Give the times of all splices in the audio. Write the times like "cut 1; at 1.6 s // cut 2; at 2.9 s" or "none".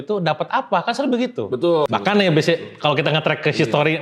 cut 1; at 1.8 s

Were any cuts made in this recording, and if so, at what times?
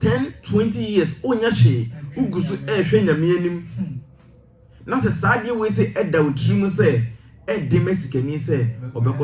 none

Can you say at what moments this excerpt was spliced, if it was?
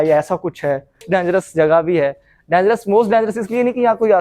cut 1; at 1.0 s

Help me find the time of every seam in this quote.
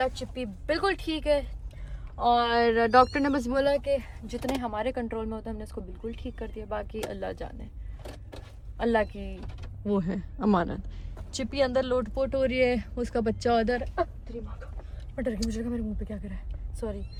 none

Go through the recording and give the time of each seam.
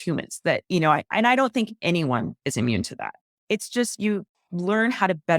cut 1; at 3.2 s // cut 2; at 4.4 s

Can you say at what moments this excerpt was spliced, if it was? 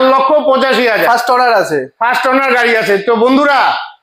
none

